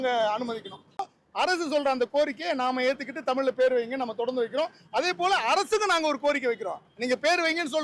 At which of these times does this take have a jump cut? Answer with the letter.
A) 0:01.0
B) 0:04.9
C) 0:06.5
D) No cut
A